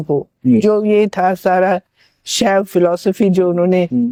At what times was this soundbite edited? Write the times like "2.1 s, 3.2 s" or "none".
none